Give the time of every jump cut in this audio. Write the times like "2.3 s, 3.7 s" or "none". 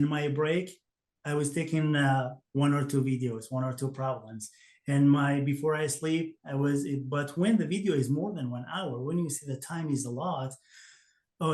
none